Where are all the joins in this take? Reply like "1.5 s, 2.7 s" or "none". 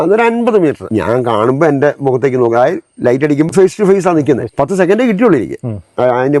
0.9 s, 3.5 s, 4.5 s